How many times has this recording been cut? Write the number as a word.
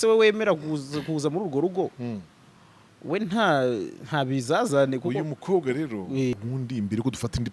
one